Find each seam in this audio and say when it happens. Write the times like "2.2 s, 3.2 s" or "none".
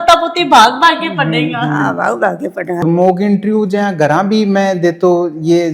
2.8 s